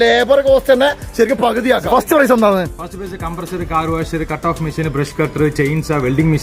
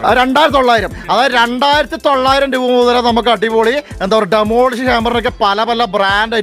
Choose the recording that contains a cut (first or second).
first